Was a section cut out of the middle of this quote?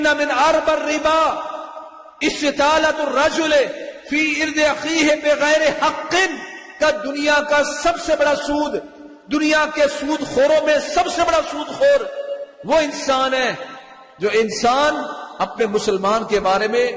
no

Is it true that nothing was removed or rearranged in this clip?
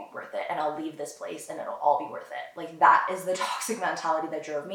yes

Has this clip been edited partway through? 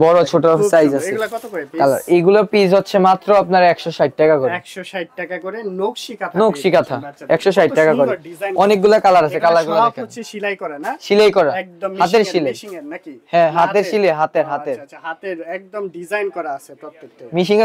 no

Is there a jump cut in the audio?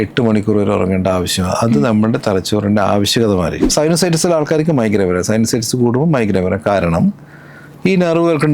yes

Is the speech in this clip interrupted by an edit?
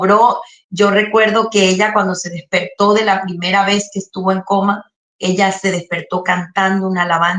no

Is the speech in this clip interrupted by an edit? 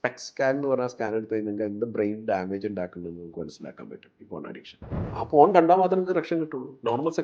yes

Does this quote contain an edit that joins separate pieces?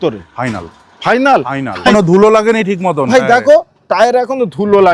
yes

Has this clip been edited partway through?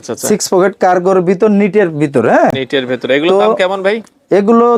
no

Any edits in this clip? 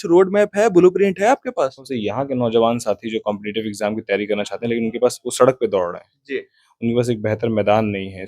yes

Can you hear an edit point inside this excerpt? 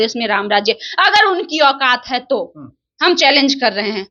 no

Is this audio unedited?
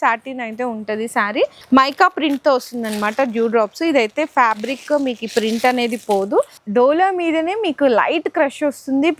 no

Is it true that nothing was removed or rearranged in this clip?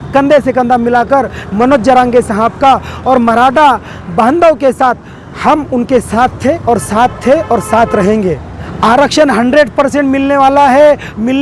no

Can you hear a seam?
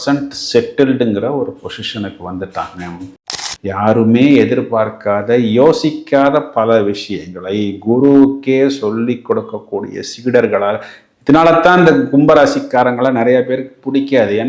yes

